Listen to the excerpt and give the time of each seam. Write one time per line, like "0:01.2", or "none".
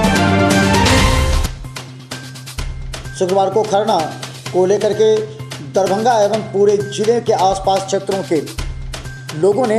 0:01.4